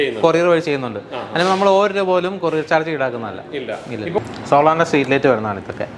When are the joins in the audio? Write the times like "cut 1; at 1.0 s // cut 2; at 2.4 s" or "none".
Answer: cut 1; at 4.2 s

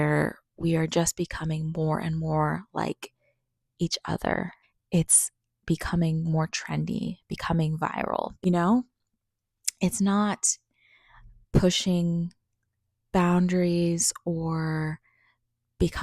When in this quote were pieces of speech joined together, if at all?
cut 1; at 4.6 s // cut 2; at 8.3 s

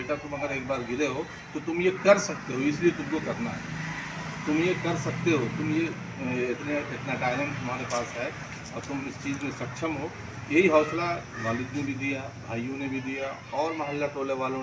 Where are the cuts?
none

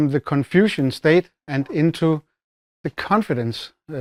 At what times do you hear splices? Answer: none

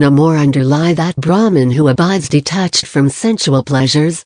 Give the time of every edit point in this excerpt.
cut 1; at 1.2 s

